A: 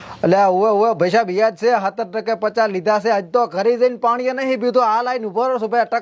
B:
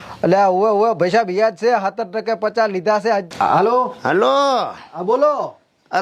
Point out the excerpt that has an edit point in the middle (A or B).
B